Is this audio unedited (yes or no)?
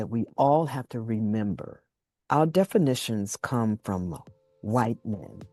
yes